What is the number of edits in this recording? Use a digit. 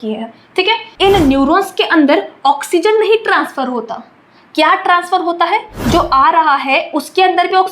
2